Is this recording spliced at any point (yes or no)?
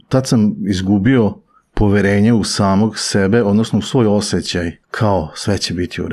yes